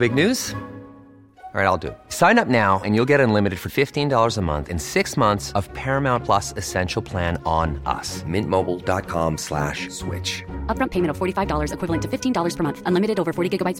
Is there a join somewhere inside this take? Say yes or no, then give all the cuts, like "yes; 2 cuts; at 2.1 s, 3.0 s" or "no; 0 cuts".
no; 0 cuts